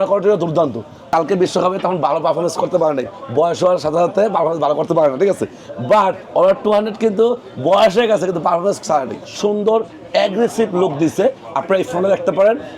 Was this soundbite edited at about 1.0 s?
yes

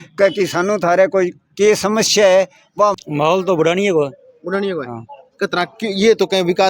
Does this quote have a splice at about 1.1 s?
no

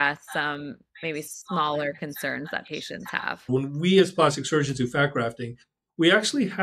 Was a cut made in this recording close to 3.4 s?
yes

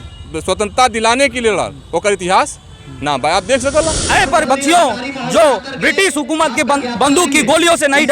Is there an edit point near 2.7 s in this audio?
no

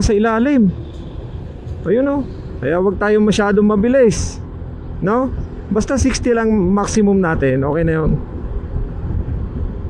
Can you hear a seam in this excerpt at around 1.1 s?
no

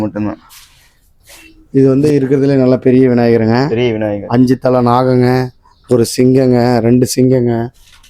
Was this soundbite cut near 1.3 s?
yes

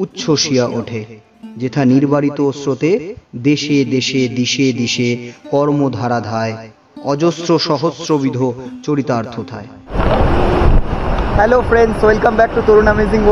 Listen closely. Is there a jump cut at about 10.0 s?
yes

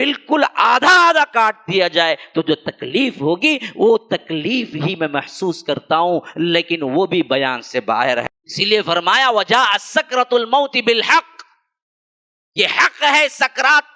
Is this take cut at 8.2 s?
yes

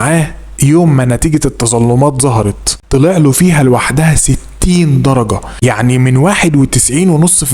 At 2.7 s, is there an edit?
yes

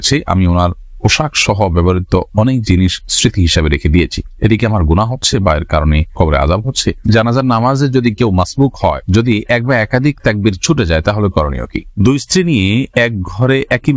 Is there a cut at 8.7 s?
no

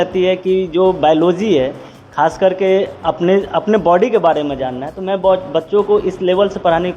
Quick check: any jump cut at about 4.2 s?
no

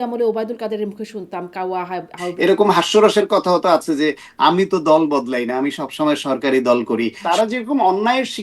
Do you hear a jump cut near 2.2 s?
yes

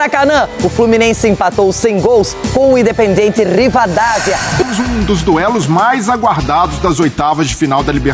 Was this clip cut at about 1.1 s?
no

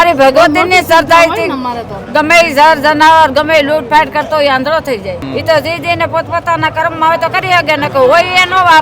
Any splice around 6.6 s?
no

